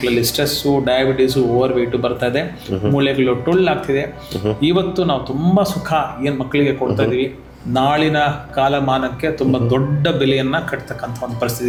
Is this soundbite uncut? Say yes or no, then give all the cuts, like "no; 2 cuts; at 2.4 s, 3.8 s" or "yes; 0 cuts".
yes; 0 cuts